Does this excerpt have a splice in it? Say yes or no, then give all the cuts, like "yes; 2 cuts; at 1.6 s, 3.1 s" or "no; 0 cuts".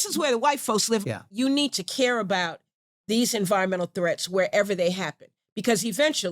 yes; 1 cut; at 1.0 s